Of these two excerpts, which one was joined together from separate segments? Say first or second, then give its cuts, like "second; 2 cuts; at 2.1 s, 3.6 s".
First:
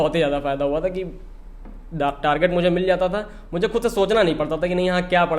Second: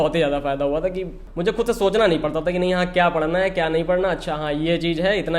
second; 1 cut; at 1.2 s